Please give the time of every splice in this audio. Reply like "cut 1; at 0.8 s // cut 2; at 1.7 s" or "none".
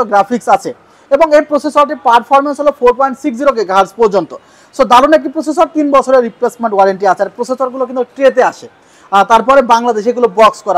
none

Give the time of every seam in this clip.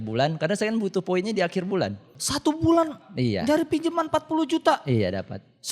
cut 1; at 2.2 s

